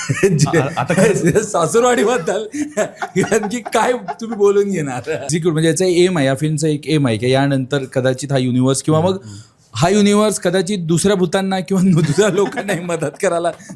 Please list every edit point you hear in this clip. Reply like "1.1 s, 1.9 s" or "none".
5.2 s